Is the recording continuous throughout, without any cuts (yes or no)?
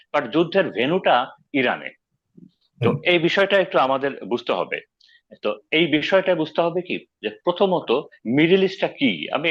yes